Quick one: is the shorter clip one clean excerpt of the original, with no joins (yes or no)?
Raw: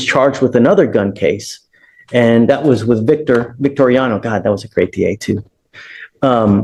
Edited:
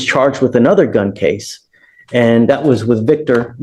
yes